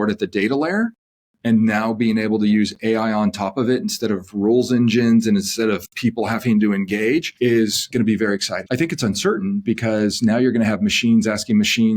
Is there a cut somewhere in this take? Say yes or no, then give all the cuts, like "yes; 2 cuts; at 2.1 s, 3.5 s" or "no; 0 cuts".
yes; 2 cuts; at 7.7 s, 8.6 s